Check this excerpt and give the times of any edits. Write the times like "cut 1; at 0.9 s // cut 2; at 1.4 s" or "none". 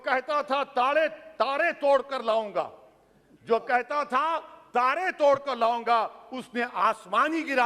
none